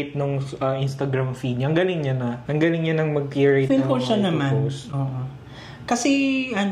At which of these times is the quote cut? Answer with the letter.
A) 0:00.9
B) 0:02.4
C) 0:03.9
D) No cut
B